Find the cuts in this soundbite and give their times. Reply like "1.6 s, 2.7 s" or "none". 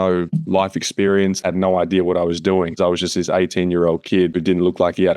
1.4 s, 2.7 s, 4.4 s